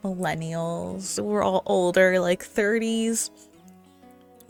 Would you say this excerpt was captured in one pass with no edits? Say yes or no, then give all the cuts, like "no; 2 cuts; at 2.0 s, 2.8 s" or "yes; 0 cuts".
yes; 0 cuts